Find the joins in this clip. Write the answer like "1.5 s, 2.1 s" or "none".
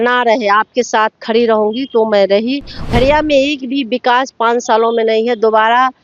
2.7 s